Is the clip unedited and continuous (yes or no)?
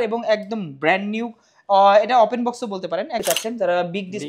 no